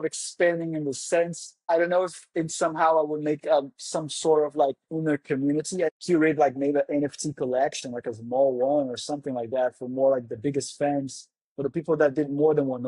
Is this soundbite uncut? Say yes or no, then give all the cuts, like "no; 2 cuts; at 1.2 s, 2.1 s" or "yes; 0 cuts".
no; 2 cuts; at 1.5 s, 6.0 s